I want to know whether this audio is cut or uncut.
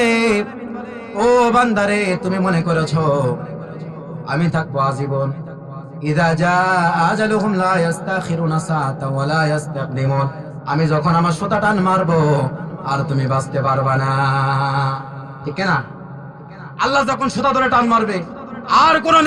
uncut